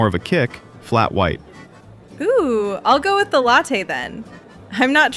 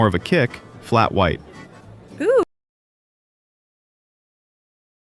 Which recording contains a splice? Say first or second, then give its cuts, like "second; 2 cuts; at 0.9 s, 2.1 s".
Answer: first; 1 cut; at 2.4 s